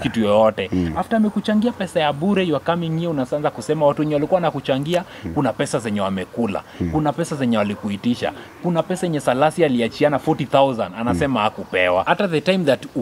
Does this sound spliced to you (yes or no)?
yes